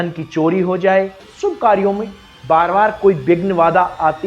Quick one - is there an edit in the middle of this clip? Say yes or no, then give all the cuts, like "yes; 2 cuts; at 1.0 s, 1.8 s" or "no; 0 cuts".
yes; 1 cut; at 1.3 s